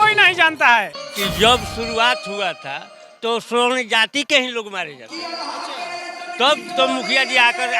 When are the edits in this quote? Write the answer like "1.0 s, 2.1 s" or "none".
1.0 s